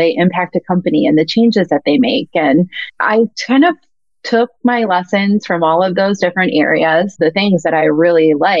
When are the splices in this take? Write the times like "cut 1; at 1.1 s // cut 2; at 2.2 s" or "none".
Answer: cut 1; at 2.9 s // cut 2; at 7.7 s